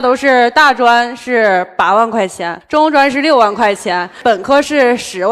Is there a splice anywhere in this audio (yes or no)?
no